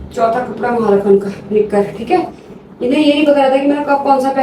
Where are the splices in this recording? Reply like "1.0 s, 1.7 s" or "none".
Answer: none